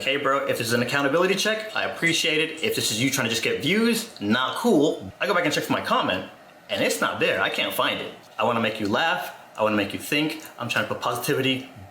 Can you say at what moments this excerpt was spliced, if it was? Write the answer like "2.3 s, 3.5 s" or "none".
8.2 s